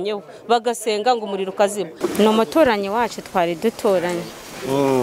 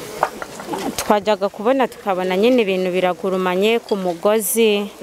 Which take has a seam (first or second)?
first